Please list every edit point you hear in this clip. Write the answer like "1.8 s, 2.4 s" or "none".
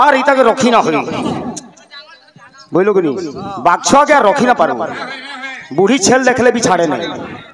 none